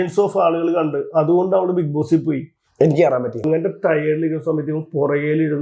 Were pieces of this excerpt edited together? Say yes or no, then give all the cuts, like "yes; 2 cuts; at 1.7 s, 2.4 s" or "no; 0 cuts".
yes; 1 cut; at 3.4 s